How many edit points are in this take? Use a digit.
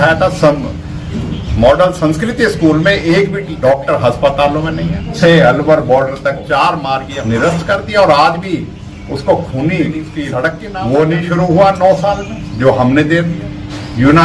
4